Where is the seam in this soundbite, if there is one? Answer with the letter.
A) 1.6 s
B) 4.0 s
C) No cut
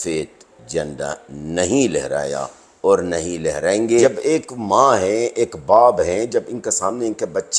B